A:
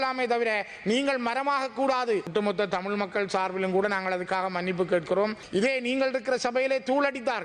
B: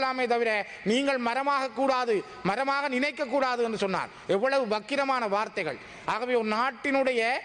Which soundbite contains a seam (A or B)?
A